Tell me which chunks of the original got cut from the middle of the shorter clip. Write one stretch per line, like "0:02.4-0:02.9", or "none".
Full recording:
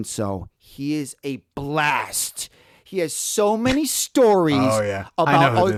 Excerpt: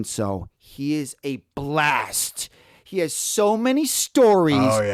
none

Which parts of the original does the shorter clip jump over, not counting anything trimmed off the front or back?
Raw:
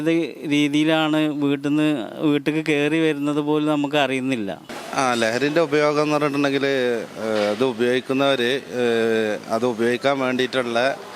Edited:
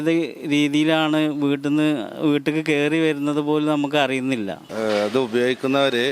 0:04.7-0:07.1

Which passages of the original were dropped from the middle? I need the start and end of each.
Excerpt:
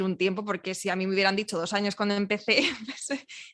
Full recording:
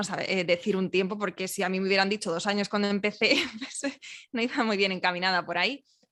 none

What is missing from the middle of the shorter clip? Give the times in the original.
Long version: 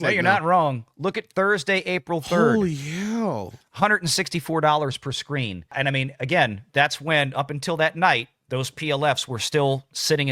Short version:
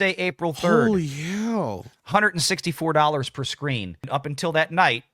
0:05.7-0:07.3

